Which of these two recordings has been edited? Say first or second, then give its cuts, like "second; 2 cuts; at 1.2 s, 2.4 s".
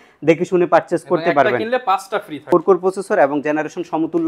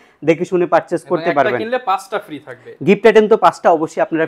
first; 1 cut; at 2.4 s